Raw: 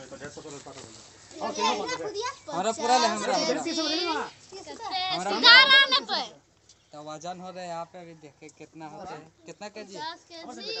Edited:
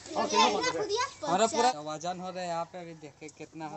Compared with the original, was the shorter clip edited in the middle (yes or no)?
yes